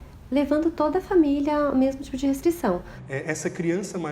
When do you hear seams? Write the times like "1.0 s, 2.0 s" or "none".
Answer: 2.9 s